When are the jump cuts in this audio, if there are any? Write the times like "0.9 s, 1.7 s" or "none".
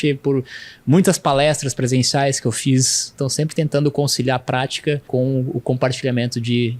3.1 s, 5.1 s